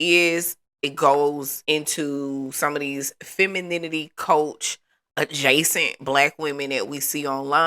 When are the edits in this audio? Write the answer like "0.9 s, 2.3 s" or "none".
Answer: 1.5 s